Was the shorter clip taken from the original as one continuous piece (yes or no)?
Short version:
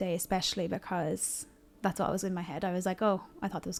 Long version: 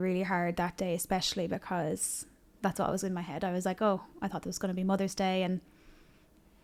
yes